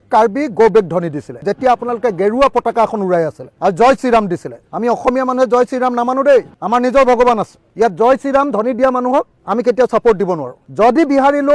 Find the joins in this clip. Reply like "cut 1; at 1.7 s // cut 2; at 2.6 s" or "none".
cut 1; at 1.4 s